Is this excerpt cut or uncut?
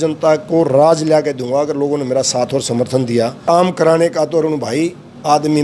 cut